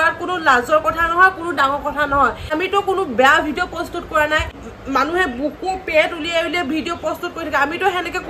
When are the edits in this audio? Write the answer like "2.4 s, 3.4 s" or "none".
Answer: 2.5 s, 4.7 s